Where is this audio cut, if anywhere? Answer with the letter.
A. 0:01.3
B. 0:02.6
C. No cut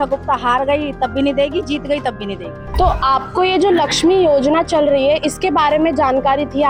C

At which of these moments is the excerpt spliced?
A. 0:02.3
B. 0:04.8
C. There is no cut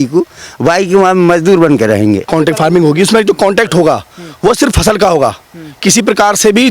A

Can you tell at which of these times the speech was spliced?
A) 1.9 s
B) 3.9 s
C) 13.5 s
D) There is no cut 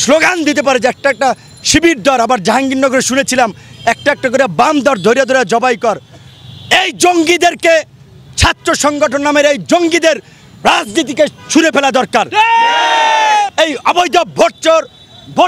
C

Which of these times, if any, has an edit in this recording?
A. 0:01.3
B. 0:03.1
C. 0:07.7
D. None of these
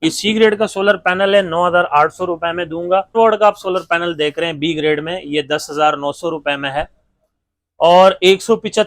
B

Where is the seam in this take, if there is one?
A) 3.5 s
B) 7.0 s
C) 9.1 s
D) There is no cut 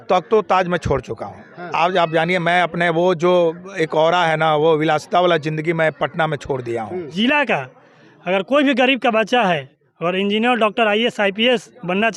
B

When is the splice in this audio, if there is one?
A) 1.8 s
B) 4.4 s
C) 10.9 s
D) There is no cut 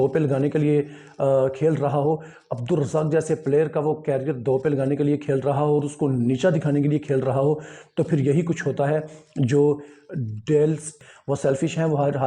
C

